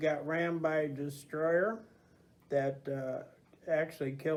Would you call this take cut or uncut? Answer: uncut